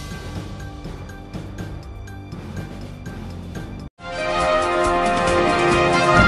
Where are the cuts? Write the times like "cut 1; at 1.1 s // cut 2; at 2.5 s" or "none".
none